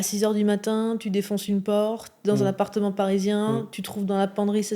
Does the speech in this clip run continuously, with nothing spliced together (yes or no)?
yes